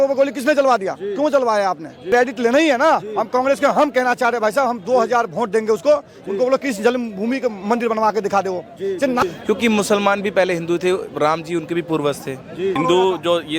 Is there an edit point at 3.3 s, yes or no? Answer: no